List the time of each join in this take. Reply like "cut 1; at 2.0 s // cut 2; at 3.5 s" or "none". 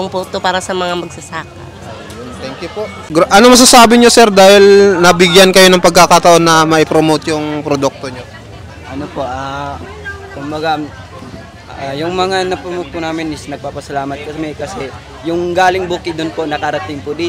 cut 1; at 3.0 s